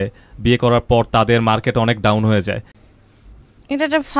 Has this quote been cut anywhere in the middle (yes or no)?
yes